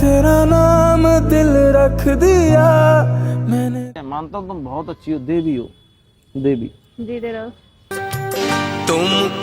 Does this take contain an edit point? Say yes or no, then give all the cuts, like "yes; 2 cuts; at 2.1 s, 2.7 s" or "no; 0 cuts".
yes; 1 cut; at 4.0 s